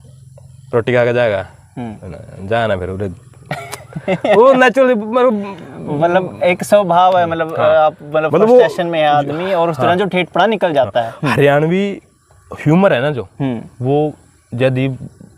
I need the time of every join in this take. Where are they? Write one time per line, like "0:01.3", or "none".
none